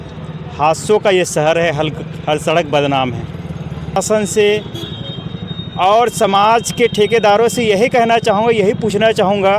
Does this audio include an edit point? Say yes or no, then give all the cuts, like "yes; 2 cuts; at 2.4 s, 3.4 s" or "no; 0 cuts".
yes; 1 cut; at 4.0 s